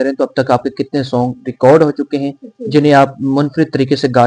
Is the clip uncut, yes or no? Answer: yes